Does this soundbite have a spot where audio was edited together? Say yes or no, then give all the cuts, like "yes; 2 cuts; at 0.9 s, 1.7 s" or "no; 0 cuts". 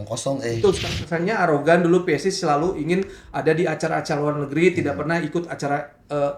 yes; 1 cut; at 0.9 s